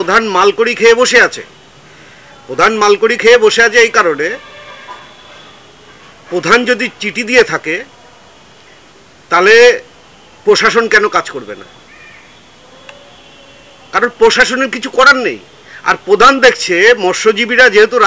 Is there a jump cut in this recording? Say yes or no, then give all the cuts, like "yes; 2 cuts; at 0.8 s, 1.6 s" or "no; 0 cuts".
no; 0 cuts